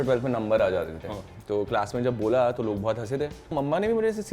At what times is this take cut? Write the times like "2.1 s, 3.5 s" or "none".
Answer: 1.3 s, 3.5 s